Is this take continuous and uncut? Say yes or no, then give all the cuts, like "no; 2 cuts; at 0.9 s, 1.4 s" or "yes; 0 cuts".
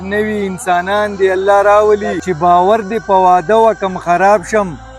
no; 1 cut; at 2.2 s